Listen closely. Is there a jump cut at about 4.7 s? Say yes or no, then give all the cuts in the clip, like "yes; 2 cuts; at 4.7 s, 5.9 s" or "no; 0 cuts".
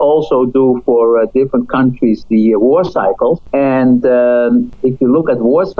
yes; 2 cuts; at 3.4 s, 4.7 s